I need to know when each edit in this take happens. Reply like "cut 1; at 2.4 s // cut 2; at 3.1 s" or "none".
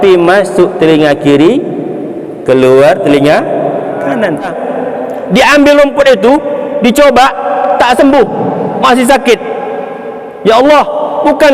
cut 1; at 4.5 s